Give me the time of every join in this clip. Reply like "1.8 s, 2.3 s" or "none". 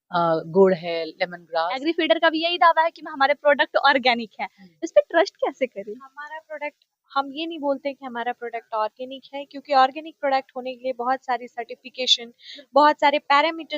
1.7 s

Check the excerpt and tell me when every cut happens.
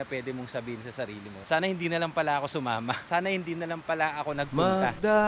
1.4 s, 3.0 s, 4.5 s

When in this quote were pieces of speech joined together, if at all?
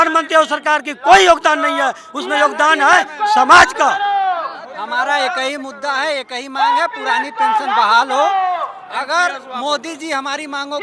none

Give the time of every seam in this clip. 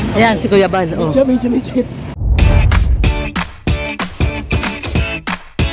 2.1 s

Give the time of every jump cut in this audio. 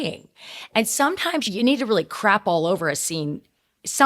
1.5 s

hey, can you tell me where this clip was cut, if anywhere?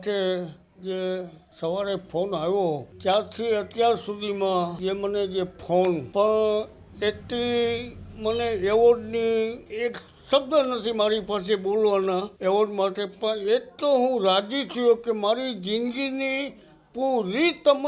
1.4 s, 2.9 s, 4.7 s, 6.1 s, 9.6 s, 12.3 s

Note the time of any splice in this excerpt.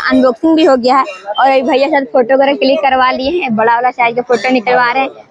none

